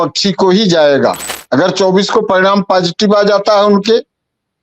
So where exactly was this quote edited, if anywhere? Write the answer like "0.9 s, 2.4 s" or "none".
1.3 s